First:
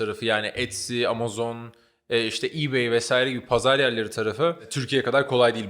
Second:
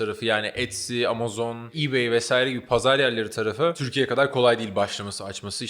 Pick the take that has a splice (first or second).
second